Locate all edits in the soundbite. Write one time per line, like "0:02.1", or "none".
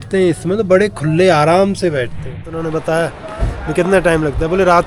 0:02.5